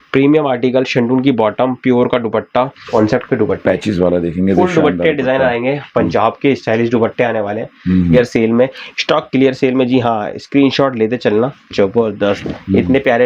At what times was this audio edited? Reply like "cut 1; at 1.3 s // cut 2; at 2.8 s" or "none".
cut 1; at 2.9 s // cut 2; at 8.1 s